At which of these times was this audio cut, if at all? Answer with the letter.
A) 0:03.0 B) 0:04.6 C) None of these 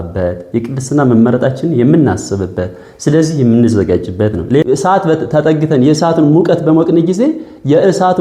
B